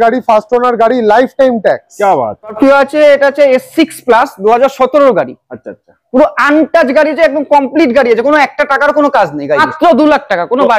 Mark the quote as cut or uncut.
cut